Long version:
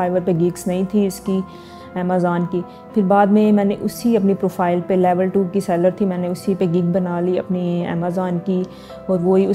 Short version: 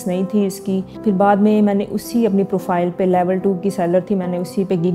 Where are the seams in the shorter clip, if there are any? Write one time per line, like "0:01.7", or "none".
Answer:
0:00.9